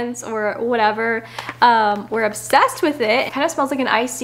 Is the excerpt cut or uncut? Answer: cut